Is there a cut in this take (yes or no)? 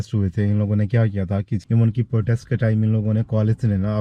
yes